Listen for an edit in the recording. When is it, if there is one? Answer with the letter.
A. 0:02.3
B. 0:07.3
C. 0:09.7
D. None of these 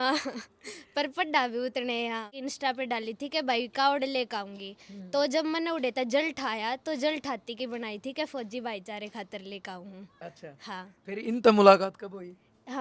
A